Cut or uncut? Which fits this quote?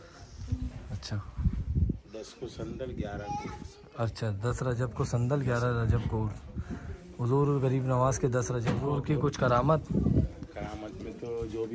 cut